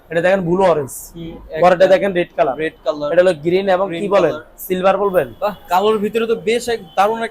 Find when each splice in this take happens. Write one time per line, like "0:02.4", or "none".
0:05.3